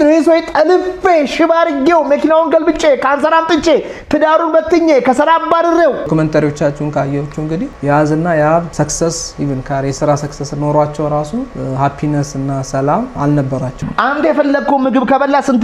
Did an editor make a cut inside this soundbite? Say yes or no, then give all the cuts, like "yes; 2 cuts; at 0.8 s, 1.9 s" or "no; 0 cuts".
yes; 5 cuts; at 6.1 s, 7.7 s, 8.7 s, 11.5 s, 13.7 s